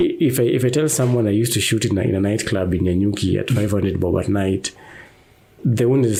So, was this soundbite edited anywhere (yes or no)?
no